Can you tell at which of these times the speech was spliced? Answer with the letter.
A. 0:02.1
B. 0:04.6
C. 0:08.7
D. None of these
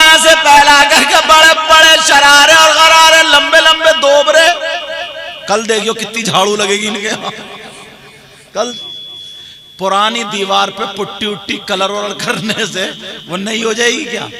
C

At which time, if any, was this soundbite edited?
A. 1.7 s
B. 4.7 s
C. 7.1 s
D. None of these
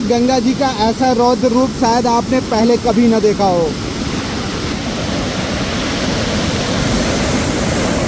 B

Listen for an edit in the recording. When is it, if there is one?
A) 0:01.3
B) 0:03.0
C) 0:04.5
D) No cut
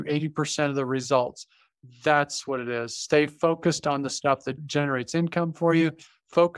C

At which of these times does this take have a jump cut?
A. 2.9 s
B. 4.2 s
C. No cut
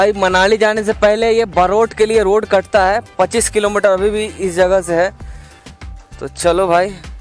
C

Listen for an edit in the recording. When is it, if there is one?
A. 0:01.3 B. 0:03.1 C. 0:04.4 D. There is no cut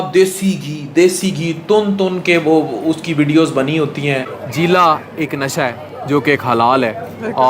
C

